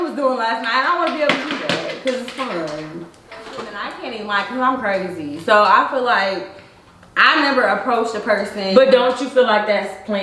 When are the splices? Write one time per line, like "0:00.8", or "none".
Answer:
0:03.9